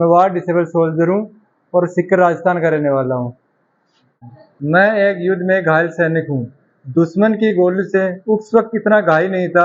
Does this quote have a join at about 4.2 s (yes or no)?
yes